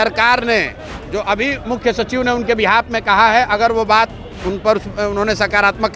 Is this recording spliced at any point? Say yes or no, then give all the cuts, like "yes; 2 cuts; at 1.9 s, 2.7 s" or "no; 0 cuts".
no; 0 cuts